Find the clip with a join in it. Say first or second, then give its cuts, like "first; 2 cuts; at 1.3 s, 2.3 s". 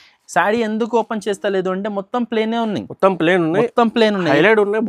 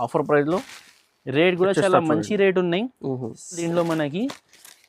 second; 1 cut; at 3.7 s